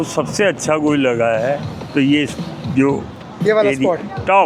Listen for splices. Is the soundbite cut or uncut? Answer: uncut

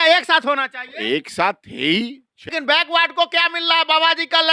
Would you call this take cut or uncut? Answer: cut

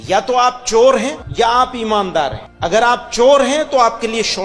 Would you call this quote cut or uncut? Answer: cut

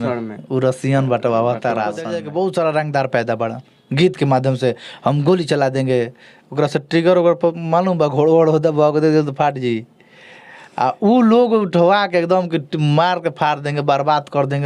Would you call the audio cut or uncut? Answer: cut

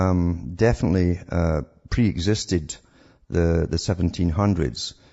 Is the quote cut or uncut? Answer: uncut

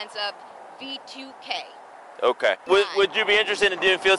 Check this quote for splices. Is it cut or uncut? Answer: uncut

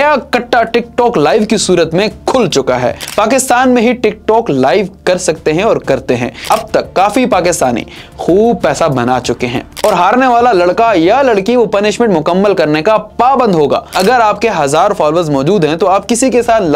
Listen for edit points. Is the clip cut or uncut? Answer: cut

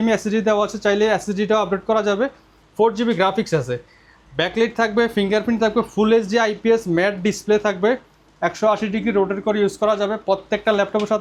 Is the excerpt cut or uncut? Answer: uncut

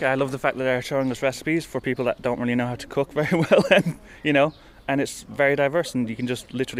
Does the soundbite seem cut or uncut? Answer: uncut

